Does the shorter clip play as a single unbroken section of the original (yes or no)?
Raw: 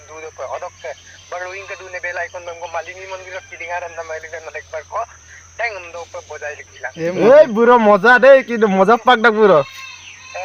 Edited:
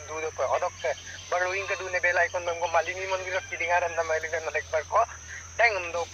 yes